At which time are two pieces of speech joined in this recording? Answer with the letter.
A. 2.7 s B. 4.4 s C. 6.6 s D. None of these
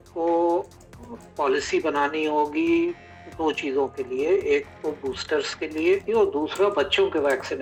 D